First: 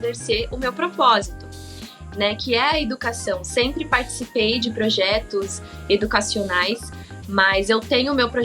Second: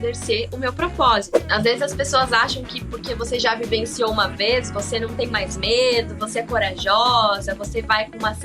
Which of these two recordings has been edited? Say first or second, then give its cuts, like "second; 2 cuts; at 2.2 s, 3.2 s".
second; 1 cut; at 1.4 s